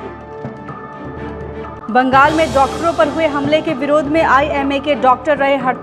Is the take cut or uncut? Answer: cut